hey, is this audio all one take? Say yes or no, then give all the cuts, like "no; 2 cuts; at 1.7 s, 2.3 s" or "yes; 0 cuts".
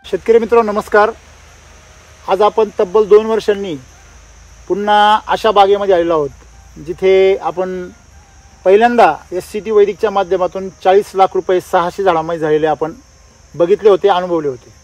yes; 0 cuts